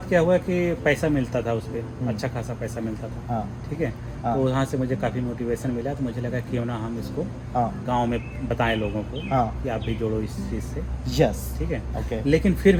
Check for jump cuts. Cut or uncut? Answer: uncut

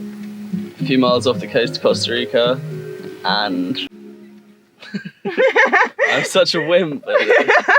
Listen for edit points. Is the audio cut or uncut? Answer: cut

